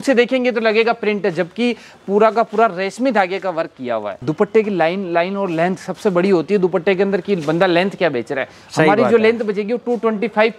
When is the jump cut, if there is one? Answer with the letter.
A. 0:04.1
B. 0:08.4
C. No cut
A